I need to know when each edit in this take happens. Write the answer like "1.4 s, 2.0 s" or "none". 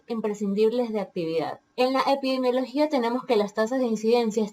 1.6 s